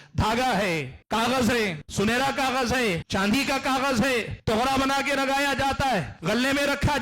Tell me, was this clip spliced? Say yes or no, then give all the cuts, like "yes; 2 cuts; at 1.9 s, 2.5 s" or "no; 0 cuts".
yes; 5 cuts; at 0.9 s, 1.8 s, 3.0 s, 4.3 s, 6.1 s